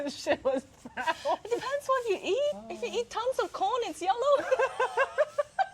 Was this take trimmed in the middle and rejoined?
yes; 1 cut; at 2.7 s

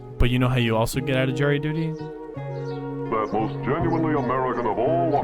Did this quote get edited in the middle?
yes; 1 cut; at 2.5 s

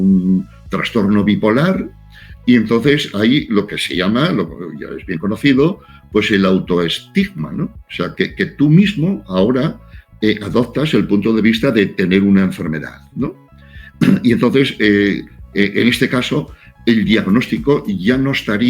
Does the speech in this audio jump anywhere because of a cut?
no; 0 cuts

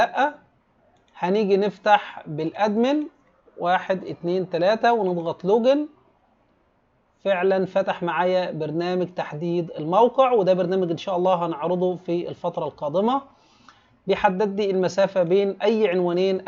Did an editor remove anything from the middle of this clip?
no; 0 cuts

